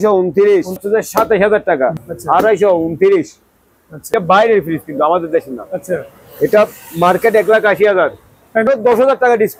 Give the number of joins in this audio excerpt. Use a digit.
3